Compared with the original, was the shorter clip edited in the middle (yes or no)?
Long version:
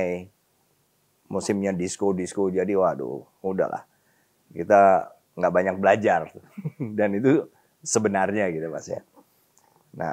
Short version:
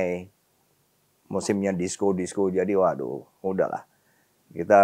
no